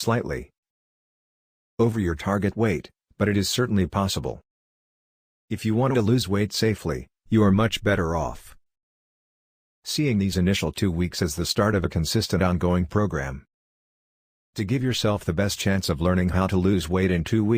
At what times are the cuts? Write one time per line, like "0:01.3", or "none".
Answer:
none

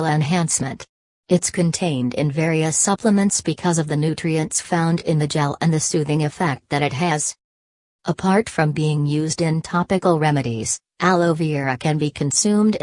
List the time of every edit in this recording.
0:10.1

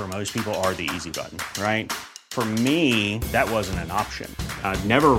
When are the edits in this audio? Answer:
none

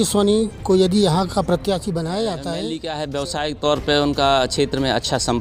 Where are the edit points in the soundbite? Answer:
0:02.8

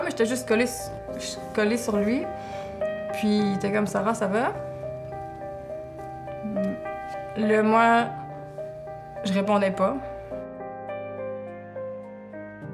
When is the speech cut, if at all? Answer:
0:08.6

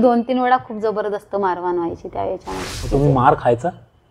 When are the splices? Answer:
0:02.7

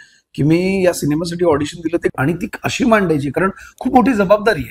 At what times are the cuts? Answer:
0:02.1

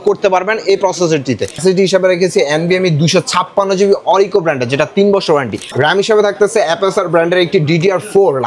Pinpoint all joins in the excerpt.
0:01.6
0:05.7

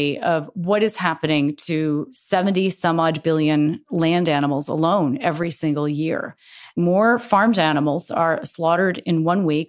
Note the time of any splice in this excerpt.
0:02.2
0:03.8
0:06.7

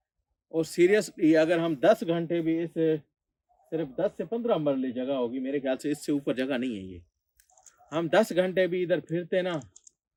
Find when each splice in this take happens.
none

